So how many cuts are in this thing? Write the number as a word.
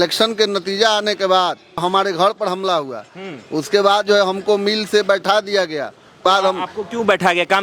two